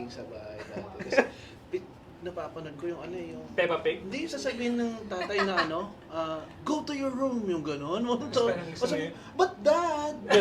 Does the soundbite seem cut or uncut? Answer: uncut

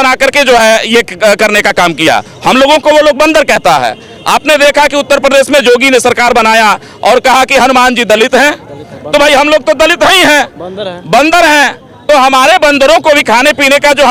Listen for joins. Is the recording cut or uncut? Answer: uncut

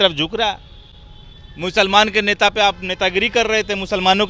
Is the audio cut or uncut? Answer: uncut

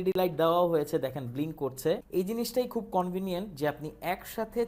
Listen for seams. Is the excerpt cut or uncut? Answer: cut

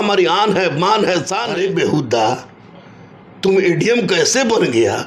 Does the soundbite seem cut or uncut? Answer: cut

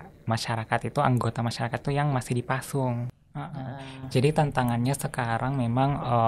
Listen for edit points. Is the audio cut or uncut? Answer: cut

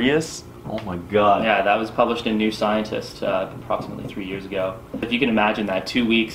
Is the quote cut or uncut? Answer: cut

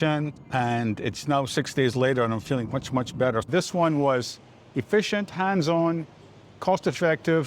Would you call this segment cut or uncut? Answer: cut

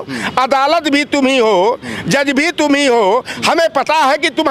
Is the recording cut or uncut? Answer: uncut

